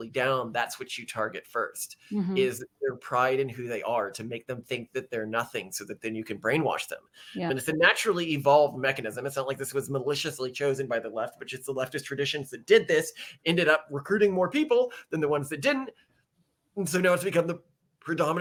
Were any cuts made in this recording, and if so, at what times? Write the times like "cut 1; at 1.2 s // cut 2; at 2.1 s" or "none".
none